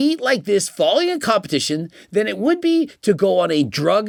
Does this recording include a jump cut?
no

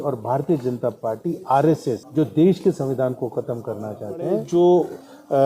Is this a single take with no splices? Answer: no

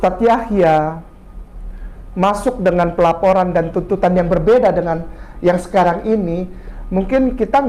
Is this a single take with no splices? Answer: yes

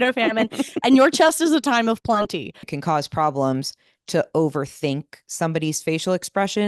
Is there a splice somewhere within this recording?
yes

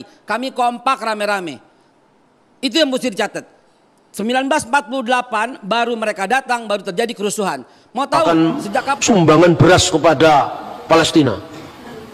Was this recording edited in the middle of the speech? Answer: no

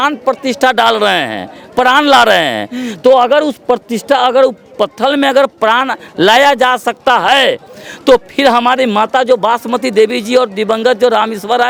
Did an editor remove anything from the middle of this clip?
no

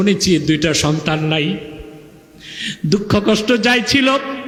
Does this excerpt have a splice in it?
no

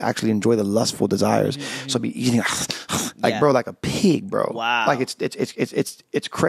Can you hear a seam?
no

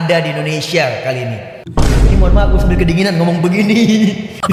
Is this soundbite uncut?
yes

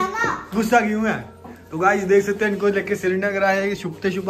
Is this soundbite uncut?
yes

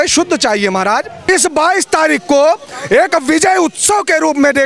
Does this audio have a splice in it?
yes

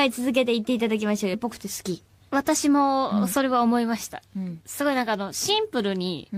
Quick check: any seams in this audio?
no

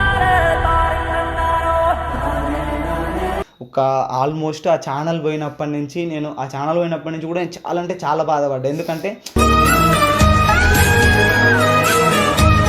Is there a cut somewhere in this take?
yes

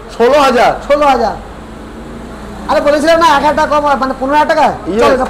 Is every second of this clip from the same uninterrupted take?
yes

